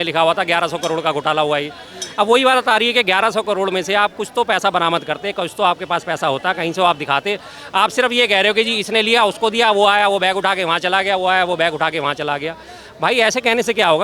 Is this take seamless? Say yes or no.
yes